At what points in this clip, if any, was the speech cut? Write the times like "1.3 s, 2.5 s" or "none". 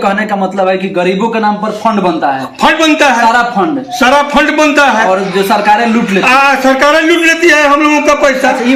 none